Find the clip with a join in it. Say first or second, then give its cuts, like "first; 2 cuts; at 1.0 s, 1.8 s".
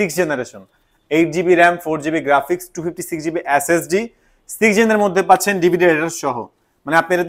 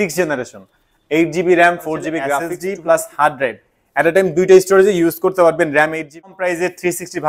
second; 2 cuts; at 2.5 s, 6.3 s